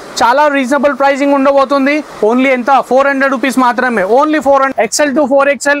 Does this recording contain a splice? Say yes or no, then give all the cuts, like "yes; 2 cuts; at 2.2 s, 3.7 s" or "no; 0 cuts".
yes; 1 cut; at 4.7 s